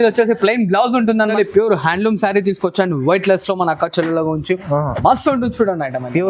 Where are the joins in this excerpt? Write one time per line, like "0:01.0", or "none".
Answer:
0:01.3